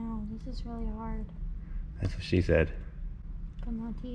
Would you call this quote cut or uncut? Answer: uncut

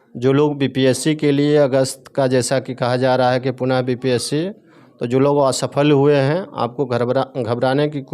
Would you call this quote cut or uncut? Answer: uncut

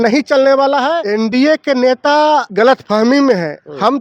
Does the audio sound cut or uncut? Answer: cut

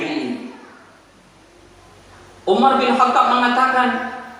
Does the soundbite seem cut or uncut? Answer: cut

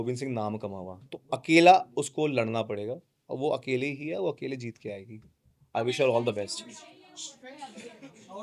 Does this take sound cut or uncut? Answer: uncut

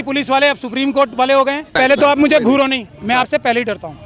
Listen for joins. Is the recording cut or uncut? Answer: cut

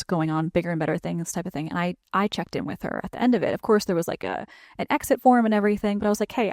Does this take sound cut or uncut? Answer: uncut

